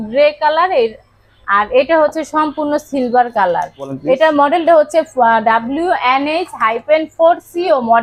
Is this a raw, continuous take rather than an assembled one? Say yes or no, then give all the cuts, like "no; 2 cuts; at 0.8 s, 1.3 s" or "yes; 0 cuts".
yes; 0 cuts